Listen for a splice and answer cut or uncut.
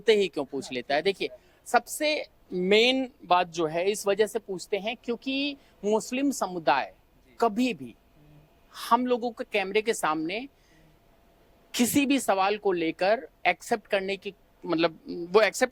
uncut